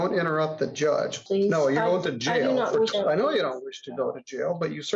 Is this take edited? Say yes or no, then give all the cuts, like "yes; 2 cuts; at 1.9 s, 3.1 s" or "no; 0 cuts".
yes; 2 cuts; at 1.2 s, 2.9 s